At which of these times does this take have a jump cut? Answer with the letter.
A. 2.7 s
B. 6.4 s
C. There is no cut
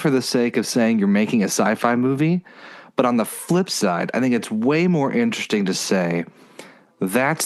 C